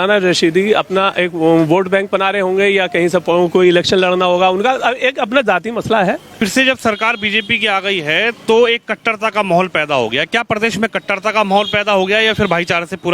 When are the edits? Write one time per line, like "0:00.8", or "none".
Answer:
0:06.4